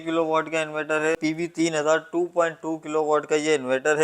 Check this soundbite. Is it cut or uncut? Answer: cut